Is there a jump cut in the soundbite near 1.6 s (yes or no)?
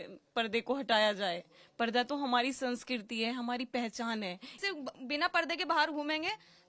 no